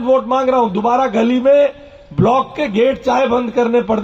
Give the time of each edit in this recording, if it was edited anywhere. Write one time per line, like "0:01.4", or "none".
none